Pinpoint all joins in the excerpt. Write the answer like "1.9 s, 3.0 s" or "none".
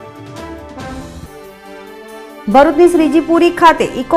0.9 s

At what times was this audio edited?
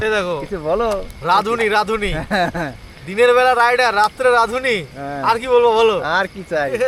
none

